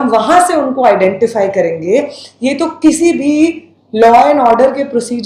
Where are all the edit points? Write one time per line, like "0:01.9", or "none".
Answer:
none